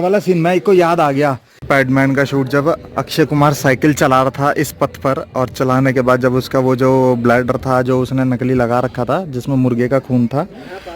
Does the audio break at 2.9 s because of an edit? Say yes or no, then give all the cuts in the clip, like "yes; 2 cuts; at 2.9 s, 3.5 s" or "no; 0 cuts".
no; 1 cut; at 1.5 s